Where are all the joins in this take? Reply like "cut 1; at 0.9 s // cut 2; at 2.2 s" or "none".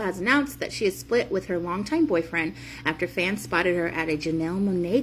none